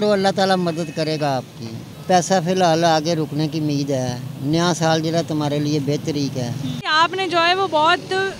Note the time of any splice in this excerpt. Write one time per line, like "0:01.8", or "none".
0:01.9
0:06.9